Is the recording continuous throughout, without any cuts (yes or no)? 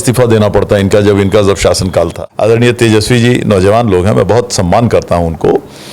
no